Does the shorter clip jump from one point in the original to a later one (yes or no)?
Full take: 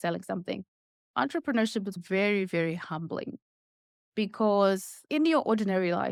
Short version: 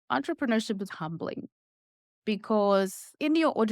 yes